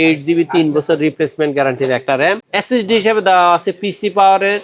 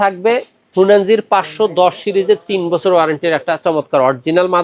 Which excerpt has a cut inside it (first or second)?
first